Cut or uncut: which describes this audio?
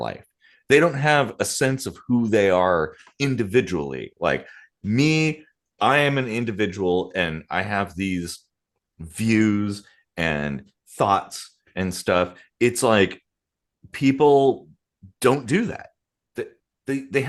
uncut